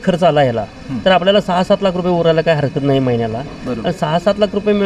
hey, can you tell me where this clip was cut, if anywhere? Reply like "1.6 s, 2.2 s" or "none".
none